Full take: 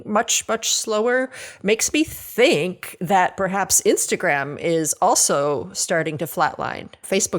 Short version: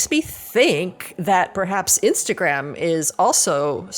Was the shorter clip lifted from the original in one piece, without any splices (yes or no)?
yes